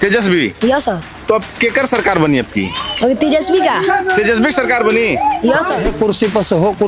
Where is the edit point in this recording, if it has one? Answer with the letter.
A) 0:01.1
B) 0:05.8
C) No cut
B